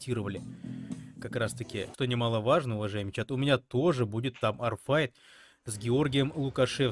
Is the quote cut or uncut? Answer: cut